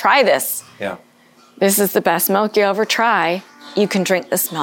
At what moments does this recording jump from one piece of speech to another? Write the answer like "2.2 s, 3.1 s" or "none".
3.6 s